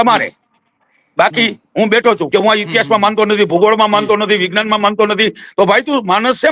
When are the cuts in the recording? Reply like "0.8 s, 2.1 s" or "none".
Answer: 2.2 s